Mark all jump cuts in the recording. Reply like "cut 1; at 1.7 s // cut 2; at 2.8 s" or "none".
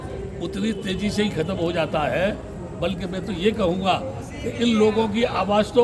none